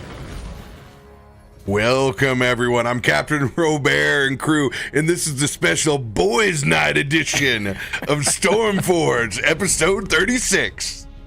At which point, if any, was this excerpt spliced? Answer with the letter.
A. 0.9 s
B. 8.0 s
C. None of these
A